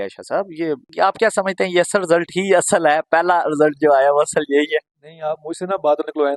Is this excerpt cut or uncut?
uncut